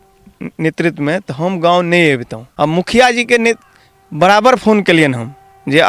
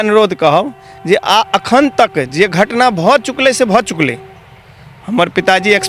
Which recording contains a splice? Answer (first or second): first